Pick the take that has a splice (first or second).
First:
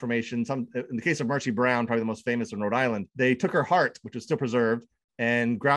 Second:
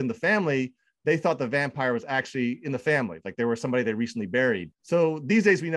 first